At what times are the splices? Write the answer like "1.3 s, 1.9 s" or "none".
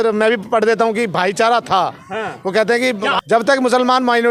3.1 s